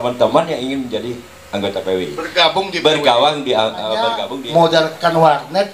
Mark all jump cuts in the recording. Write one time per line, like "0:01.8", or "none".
0:04.3